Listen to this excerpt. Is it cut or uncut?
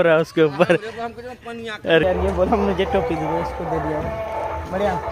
cut